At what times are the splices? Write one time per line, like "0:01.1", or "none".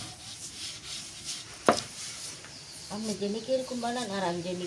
none